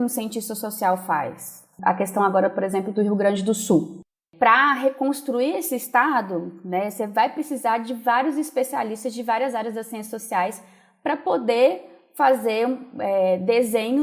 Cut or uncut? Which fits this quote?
cut